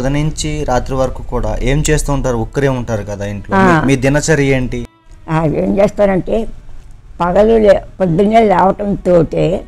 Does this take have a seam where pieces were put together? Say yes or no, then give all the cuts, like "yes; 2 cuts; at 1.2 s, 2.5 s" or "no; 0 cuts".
no; 0 cuts